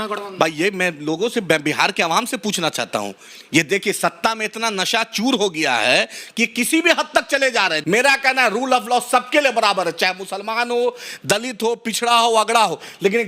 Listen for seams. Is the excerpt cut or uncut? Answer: cut